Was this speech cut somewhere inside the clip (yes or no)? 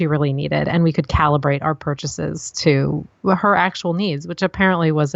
no